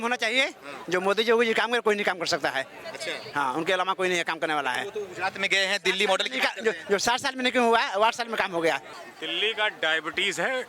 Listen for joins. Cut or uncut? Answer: uncut